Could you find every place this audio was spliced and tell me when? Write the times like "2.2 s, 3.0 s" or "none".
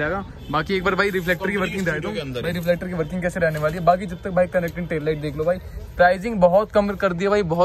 none